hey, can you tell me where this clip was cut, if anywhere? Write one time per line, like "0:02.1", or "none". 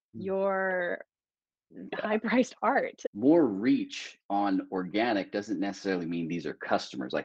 0:03.0